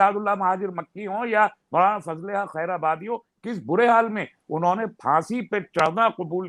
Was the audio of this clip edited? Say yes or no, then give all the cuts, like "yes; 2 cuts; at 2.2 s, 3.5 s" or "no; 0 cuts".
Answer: no; 0 cuts